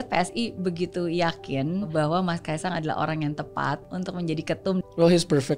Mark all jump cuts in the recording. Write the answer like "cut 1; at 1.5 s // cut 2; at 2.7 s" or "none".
cut 1; at 1.9 s // cut 2; at 3.9 s // cut 3; at 4.8 s